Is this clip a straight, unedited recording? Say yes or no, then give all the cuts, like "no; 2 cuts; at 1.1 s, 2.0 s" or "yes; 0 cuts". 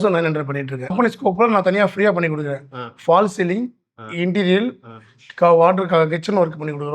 no; 1 cut; at 0.9 s